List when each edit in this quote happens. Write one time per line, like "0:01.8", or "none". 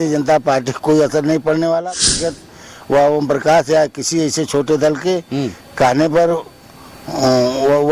0:02.4